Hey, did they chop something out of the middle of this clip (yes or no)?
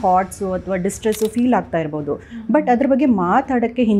no